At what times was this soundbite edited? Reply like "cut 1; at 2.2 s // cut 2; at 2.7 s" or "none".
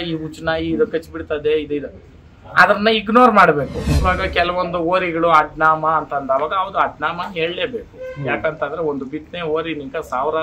cut 1; at 3.9 s